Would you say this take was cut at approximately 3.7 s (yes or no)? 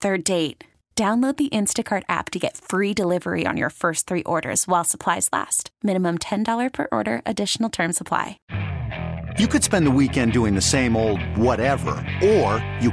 no